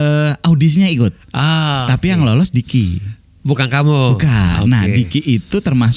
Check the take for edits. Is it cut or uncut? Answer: uncut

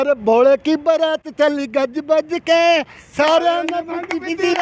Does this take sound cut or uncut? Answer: uncut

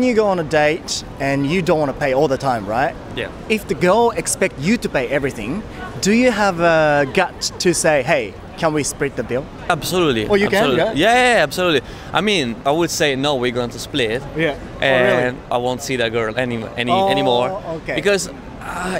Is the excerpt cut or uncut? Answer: uncut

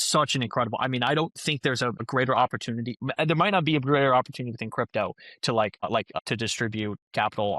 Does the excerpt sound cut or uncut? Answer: uncut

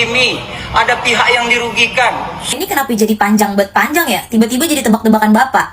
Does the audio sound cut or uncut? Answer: cut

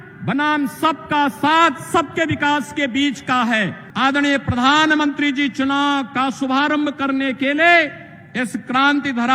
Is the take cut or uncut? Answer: cut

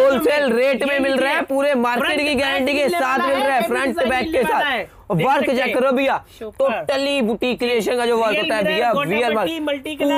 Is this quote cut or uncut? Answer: uncut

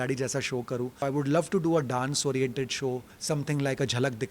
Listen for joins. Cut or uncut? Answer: cut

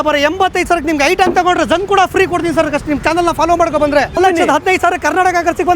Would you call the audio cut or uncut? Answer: cut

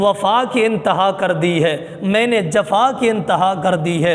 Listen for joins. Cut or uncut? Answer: uncut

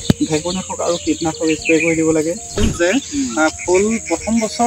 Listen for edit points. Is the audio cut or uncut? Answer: cut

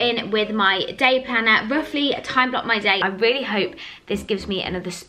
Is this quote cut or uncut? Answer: cut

